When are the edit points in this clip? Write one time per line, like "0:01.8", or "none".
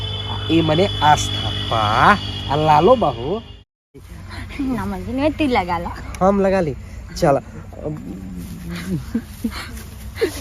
0:04.0